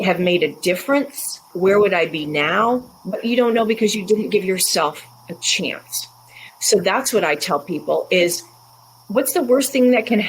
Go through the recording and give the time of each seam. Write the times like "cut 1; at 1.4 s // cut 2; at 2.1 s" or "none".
cut 1; at 1.5 s